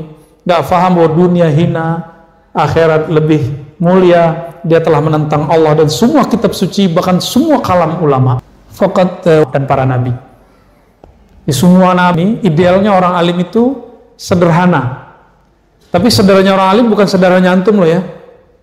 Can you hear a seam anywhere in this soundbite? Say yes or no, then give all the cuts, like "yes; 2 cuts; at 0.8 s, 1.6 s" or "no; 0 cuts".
yes; 3 cuts; at 8.4 s, 9.4 s, 12.2 s